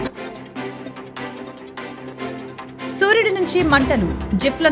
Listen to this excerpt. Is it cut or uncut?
uncut